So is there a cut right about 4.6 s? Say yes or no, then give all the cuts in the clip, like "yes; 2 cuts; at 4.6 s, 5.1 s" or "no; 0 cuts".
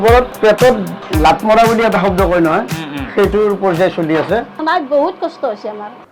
yes; 1 cut; at 4.6 s